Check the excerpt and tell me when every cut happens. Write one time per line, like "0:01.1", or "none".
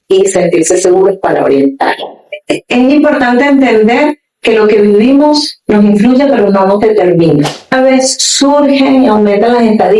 0:02.3
0:07.7